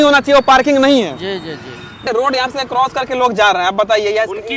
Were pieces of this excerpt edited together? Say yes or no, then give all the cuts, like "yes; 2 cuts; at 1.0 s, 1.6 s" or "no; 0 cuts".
yes; 1 cut; at 2.0 s